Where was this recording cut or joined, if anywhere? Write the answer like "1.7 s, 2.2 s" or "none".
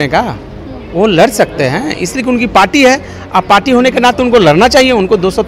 none